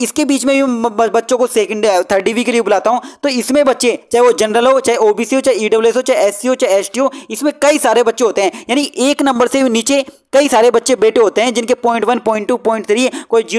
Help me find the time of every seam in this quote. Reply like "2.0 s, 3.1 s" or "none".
none

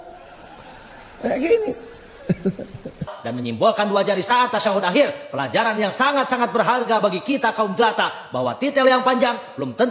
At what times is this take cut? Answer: 3.1 s

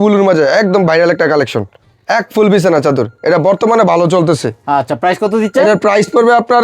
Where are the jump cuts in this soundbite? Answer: none

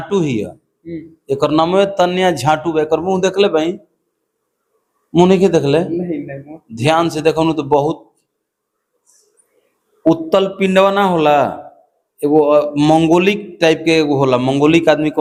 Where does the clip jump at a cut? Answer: none

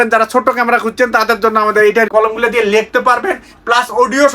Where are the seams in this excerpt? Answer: 2.1 s

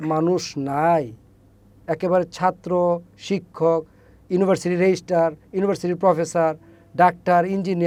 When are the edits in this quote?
none

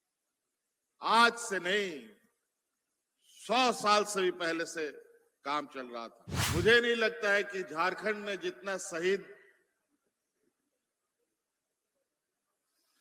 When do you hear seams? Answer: 6.3 s

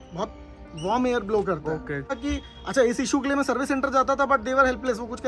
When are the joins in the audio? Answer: 2.1 s

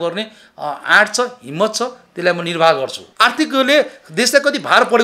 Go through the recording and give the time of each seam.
3.0 s

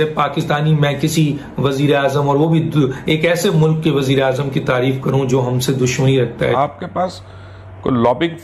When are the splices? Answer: 6.6 s

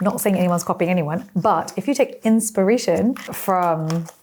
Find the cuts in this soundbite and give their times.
none

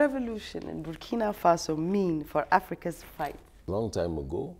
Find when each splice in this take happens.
3.5 s

